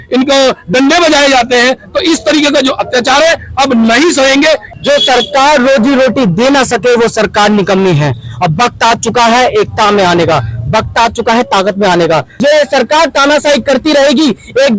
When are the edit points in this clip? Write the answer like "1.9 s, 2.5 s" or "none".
4.7 s, 12.4 s